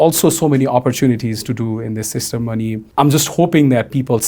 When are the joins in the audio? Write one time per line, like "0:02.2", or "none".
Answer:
0:02.9